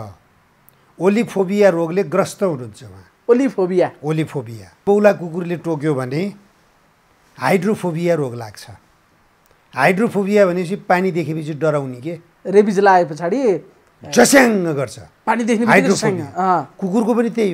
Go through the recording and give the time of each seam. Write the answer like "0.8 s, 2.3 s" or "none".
4.8 s